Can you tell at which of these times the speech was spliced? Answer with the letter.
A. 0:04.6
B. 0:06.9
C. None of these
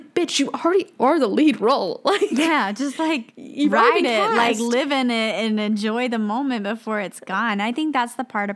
C